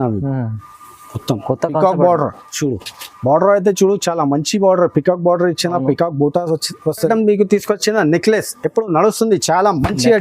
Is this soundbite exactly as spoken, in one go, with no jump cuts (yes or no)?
no